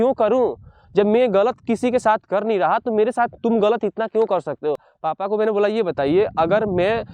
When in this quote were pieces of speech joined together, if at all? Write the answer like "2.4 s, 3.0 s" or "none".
4.9 s

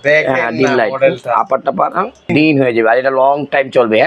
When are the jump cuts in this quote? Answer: 2.3 s

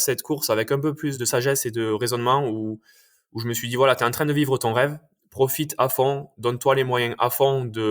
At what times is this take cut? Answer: 1.1 s

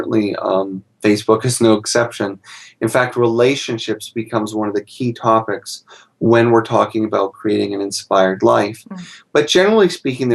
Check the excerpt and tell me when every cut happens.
7.4 s

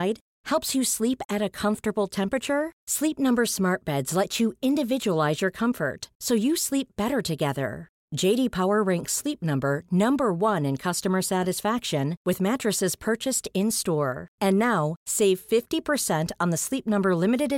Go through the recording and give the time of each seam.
none

